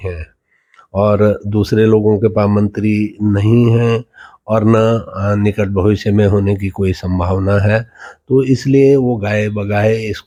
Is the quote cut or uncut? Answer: uncut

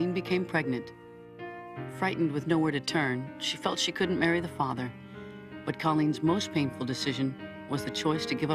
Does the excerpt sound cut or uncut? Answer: cut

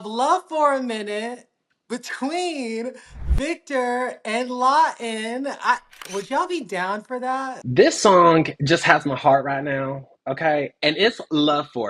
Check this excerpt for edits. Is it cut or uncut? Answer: cut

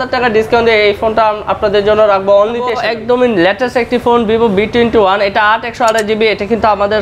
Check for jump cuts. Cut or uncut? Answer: cut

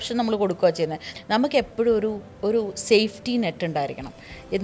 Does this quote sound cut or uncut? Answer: cut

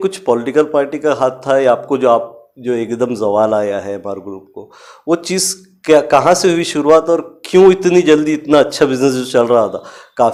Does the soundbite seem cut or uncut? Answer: uncut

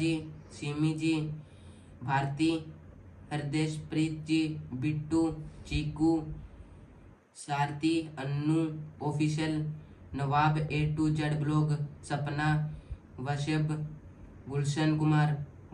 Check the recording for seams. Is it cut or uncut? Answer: uncut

